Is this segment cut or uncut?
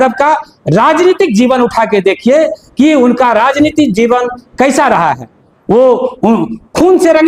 uncut